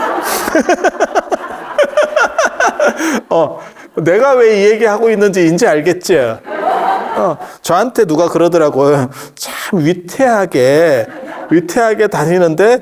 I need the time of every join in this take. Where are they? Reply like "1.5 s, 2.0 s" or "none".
none